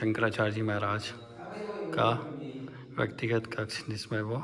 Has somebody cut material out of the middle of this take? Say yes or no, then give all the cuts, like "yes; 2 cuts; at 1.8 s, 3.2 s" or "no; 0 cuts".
no; 0 cuts